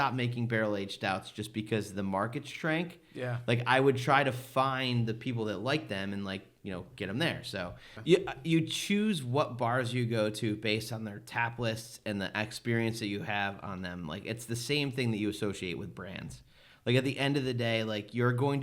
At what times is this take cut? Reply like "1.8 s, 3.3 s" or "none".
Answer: 7.9 s